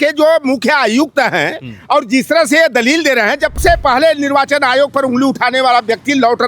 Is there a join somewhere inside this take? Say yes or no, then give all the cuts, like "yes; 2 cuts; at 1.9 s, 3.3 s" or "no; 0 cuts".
yes; 1 cut; at 3.5 s